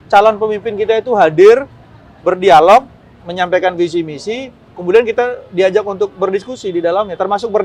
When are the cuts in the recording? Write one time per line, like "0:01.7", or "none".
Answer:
none